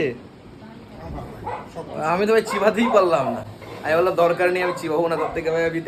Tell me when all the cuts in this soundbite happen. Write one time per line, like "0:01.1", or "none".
none